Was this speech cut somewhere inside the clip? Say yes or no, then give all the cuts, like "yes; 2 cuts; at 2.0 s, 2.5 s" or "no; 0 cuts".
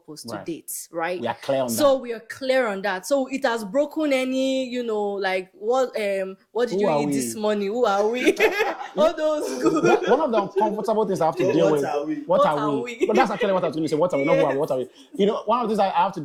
no; 0 cuts